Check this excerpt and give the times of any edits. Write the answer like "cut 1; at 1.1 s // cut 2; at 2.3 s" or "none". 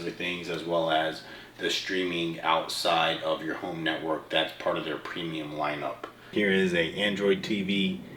cut 1; at 6.1 s